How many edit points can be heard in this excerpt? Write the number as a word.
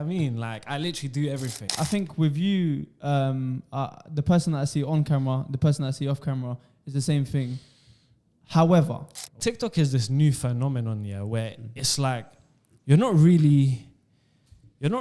two